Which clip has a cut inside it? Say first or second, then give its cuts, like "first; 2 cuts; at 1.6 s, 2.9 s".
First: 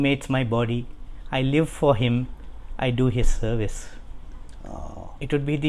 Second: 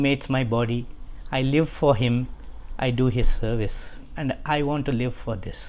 second; 1 cut; at 4.1 s